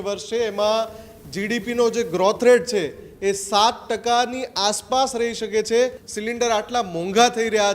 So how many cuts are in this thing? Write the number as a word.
one